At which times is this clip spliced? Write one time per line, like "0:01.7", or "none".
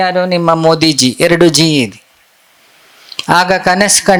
none